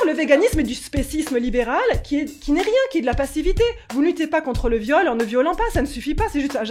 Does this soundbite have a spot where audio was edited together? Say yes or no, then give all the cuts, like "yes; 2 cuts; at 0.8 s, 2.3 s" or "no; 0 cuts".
no; 0 cuts